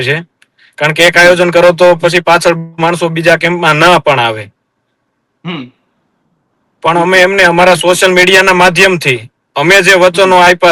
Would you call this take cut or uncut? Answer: uncut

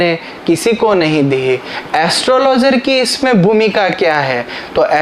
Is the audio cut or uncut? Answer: cut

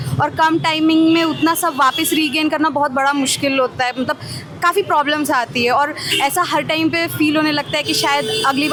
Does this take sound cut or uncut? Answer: uncut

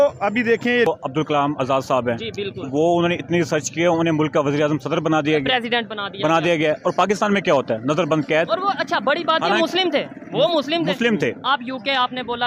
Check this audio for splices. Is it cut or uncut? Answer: cut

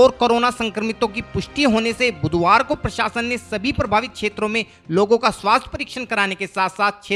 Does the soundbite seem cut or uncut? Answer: uncut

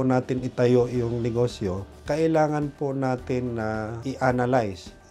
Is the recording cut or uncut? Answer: cut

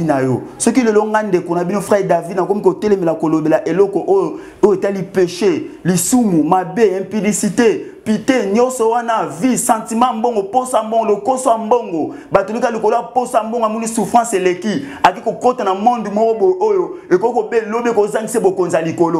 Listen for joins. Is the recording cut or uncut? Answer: uncut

